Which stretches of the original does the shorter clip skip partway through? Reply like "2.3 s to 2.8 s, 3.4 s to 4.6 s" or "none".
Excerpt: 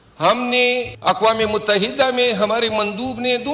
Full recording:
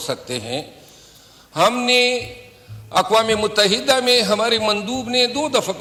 2.3 s to 2.8 s